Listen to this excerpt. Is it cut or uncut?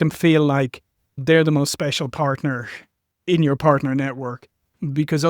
cut